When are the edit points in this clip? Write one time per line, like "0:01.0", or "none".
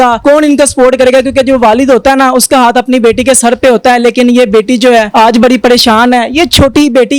none